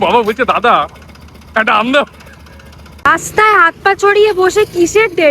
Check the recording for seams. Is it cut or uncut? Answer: cut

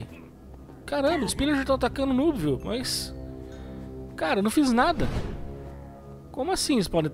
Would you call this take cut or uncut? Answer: uncut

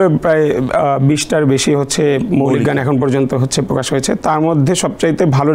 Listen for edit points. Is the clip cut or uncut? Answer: uncut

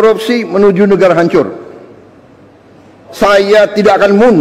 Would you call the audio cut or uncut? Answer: cut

